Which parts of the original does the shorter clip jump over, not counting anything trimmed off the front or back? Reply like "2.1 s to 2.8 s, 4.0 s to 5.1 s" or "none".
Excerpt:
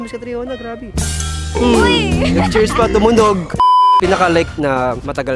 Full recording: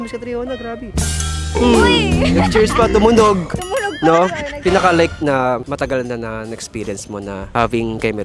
3.8 s to 4.4 s